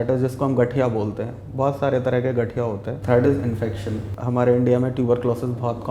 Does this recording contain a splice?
no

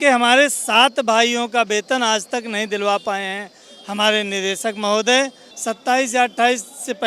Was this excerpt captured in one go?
no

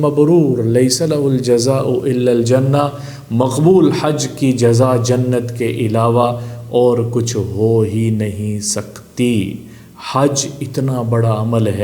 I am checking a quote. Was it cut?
no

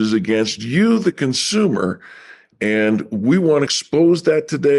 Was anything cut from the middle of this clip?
yes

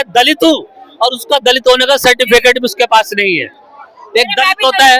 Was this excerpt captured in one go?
yes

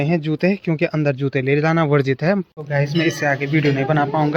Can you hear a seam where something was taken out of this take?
yes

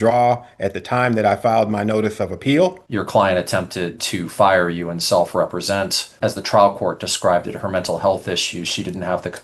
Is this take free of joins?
no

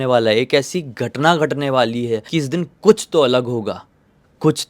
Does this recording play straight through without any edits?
no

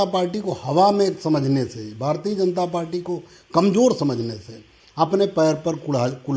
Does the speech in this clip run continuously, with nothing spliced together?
yes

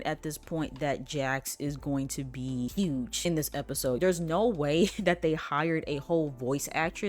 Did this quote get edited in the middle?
yes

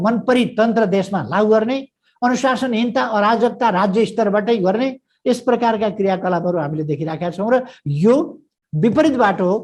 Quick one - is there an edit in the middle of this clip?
no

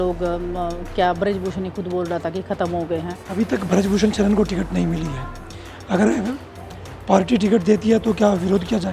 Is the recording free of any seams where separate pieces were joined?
no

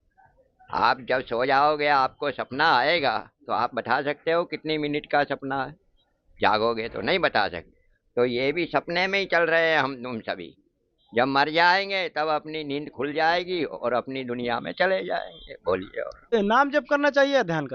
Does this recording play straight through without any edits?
no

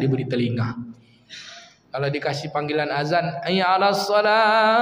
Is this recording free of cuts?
yes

